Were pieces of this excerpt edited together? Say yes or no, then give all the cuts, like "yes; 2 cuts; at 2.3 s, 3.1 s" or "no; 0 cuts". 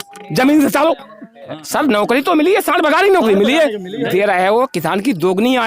yes; 2 cuts; at 1.6 s, 4.1 s